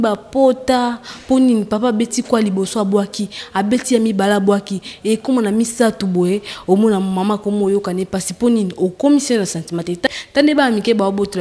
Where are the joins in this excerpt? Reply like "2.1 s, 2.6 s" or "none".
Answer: 10.1 s